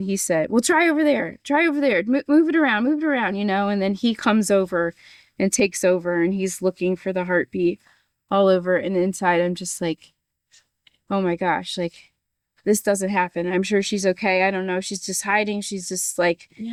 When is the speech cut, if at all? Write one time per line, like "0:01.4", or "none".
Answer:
none